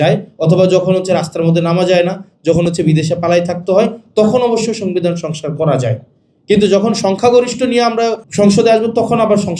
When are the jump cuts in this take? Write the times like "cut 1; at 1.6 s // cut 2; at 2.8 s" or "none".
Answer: cut 1; at 8.2 s